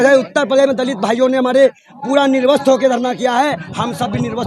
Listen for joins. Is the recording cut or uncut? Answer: uncut